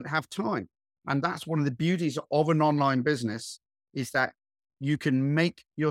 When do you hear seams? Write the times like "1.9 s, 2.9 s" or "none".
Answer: none